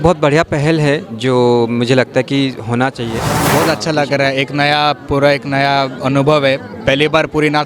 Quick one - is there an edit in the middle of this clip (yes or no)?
yes